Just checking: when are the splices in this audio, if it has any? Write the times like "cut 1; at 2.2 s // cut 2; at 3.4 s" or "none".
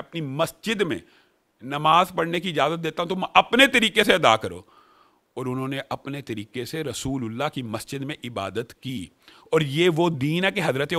none